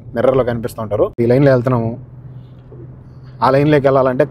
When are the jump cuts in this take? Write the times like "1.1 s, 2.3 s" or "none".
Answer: 1.1 s